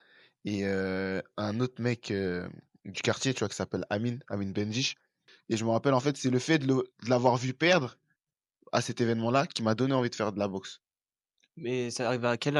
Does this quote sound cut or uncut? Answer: uncut